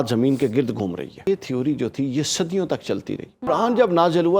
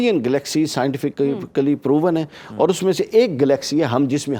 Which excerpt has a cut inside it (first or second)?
first